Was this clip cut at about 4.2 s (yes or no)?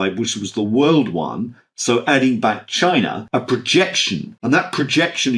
yes